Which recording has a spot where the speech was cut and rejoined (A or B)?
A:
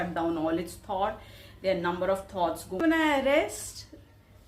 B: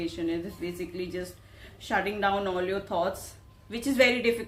A